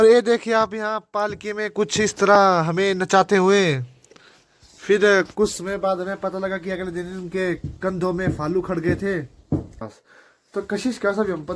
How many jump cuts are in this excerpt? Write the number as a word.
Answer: one